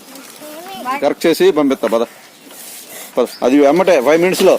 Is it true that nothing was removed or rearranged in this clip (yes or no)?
no